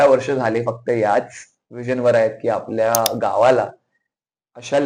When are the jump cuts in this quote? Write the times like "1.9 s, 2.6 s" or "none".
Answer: none